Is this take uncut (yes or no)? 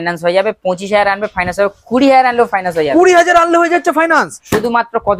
yes